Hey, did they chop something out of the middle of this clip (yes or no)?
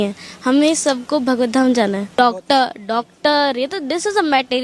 yes